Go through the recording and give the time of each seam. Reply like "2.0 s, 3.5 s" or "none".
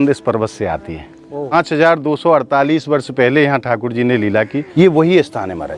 1.5 s, 4.6 s

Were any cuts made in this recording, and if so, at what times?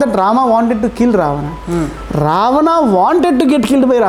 none

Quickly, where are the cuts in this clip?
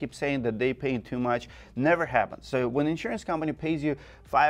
none

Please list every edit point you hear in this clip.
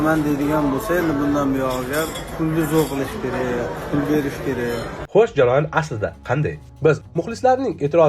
2.2 s, 5.0 s, 7.0 s

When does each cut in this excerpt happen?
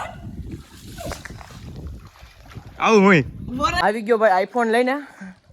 3.8 s

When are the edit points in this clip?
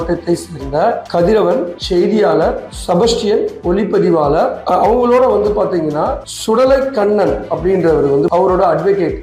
8.3 s

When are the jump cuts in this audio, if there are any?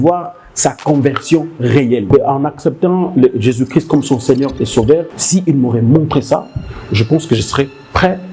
2.1 s, 5.2 s

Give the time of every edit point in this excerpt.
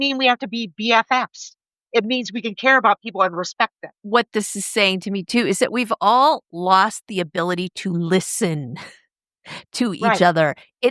3.9 s

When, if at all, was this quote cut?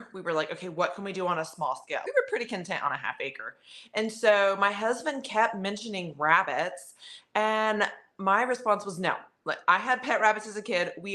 none

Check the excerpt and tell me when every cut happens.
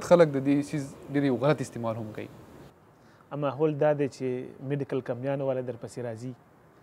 2.7 s

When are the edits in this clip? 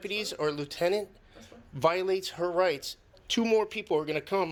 none

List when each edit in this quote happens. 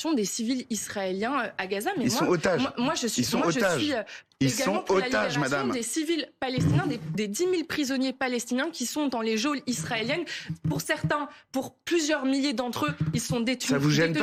none

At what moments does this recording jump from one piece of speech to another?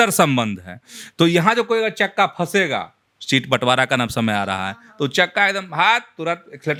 none

